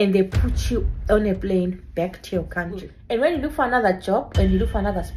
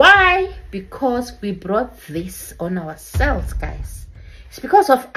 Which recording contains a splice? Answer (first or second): first